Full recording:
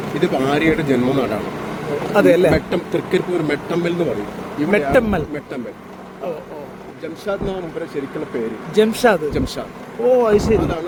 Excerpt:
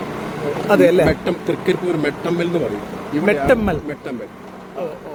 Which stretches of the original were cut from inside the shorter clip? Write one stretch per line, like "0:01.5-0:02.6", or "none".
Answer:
none